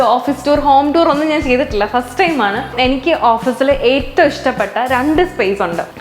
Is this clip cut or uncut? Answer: cut